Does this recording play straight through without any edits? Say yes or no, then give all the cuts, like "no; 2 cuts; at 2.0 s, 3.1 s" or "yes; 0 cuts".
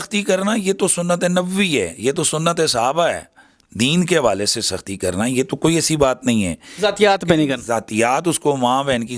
yes; 0 cuts